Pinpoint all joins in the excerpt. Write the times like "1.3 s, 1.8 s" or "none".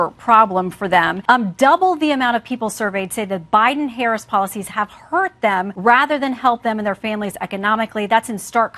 1.2 s, 5.7 s